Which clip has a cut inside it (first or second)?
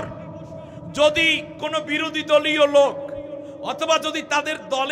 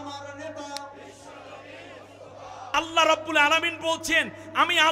second